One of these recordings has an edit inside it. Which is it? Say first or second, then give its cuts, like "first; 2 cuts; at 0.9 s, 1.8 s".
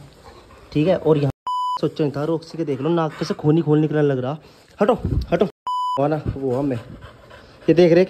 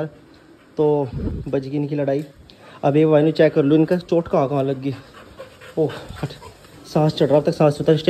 first; 2 cuts; at 1.6 s, 6.0 s